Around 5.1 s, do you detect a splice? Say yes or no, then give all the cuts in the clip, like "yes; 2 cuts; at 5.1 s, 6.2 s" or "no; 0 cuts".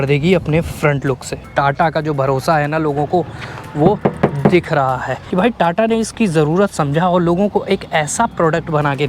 yes; 2 cuts; at 1.3 s, 5.1 s